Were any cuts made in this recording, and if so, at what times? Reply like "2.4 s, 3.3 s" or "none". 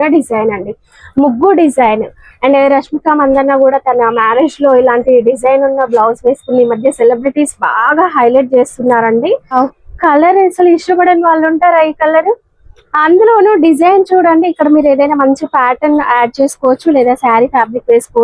9.5 s